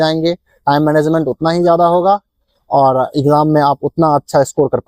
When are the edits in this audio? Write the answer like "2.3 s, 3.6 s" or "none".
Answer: none